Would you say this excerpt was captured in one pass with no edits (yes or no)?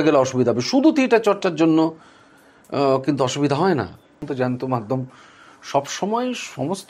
no